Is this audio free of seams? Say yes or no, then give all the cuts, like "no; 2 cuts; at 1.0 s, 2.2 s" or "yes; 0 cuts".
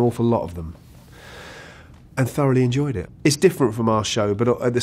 no; 1 cut; at 3.0 s